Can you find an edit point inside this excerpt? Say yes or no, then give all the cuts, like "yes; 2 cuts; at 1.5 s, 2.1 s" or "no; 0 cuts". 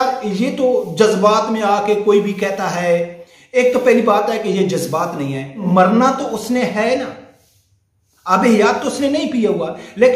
yes; 1 cut; at 5.6 s